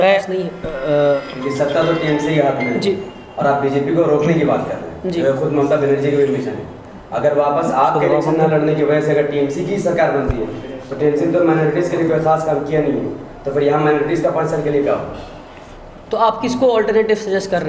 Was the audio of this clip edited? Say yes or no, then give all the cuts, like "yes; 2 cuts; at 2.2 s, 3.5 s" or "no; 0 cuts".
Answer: no; 0 cuts